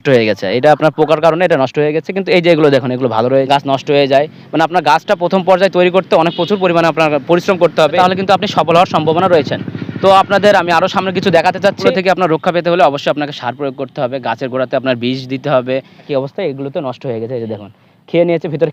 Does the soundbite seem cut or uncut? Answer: cut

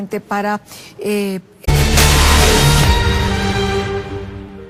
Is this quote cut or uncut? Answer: uncut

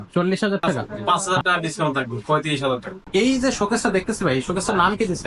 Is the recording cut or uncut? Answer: cut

